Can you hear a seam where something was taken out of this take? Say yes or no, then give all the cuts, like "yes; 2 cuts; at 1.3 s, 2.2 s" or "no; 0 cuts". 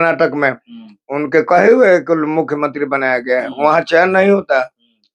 no; 0 cuts